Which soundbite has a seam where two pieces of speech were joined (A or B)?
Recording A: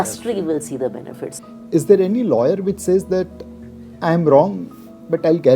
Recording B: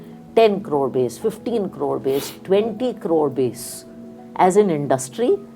A